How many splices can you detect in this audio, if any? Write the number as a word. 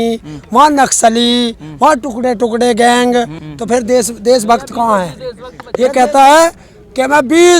two